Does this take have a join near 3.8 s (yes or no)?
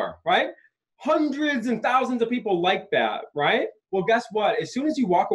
yes